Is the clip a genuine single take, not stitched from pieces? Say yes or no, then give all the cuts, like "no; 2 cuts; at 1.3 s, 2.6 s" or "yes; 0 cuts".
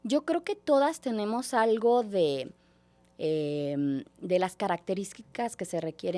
yes; 0 cuts